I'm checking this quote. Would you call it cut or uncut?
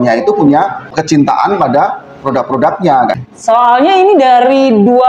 cut